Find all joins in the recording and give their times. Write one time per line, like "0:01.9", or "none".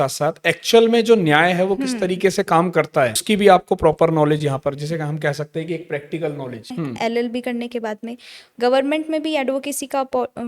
0:03.2
0:06.7